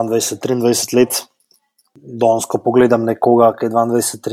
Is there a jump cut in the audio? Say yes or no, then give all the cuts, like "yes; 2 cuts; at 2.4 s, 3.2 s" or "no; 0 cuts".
no; 0 cuts